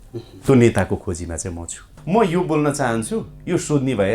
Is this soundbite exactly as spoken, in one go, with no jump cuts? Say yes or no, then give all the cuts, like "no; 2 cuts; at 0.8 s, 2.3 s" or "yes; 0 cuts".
no; 1 cut; at 1.9 s